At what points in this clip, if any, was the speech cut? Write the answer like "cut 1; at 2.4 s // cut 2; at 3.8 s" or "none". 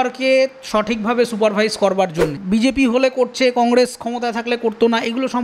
cut 1; at 2.3 s

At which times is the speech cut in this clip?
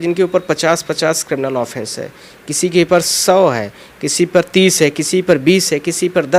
none

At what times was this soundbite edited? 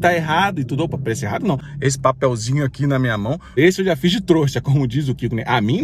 cut 1; at 1.7 s // cut 2; at 3.6 s

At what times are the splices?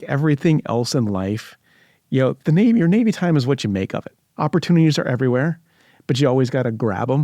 cut 1; at 4.3 s

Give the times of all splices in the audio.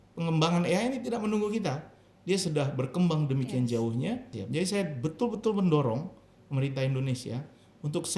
cut 1; at 4.4 s

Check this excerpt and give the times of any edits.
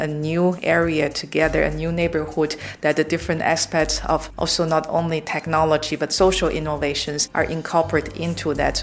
cut 1; at 4.3 s // cut 2; at 7.2 s

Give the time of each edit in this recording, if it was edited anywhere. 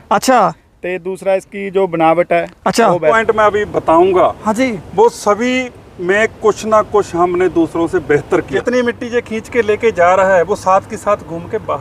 cut 1; at 3.2 s // cut 2; at 8.5 s

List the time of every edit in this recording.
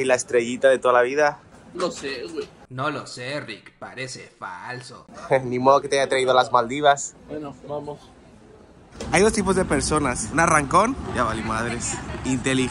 none

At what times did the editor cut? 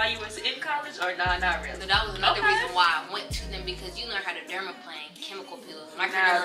cut 1; at 1.7 s

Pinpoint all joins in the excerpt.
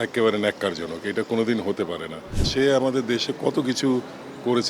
cut 1; at 2.5 s

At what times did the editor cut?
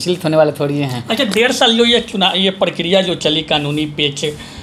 none

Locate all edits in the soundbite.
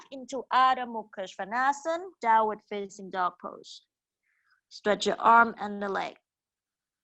none

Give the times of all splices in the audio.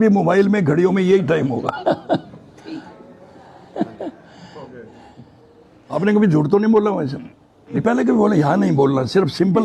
cut 1; at 5.9 s // cut 2; at 7.8 s

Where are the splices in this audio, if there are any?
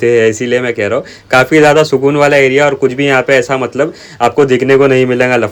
none

